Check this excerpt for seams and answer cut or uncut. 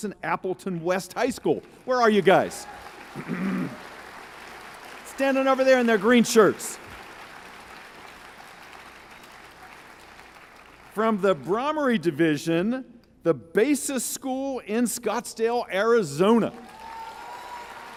uncut